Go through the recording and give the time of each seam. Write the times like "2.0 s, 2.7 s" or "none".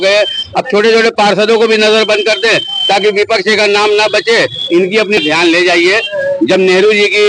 5.2 s